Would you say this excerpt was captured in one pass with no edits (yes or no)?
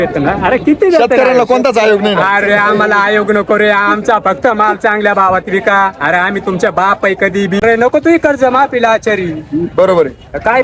no